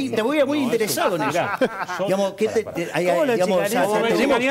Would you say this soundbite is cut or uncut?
uncut